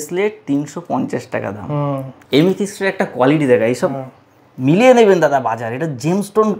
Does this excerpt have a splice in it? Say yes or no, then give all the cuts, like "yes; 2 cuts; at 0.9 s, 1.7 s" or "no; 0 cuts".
yes; 1 cut; at 2.2 s